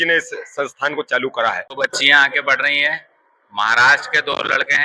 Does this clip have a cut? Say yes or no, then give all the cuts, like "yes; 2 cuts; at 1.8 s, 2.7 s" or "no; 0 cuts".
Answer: yes; 1 cut; at 1.7 s